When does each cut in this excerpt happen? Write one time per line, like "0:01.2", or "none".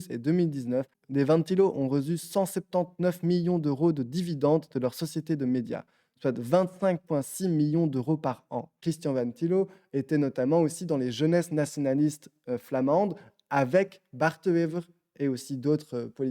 0:01.0
0:08.7